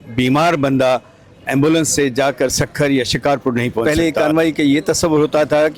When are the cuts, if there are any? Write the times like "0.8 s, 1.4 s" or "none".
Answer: 3.8 s